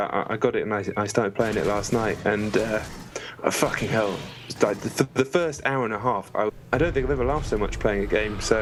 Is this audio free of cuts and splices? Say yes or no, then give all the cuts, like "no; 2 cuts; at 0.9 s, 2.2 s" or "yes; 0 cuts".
yes; 0 cuts